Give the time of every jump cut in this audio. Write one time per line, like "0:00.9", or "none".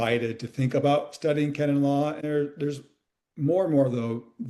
0:02.2